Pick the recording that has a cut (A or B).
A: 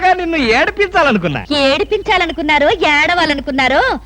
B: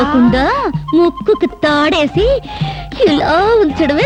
A